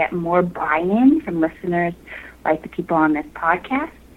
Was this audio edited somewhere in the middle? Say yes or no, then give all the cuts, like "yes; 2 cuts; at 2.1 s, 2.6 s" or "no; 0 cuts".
no; 0 cuts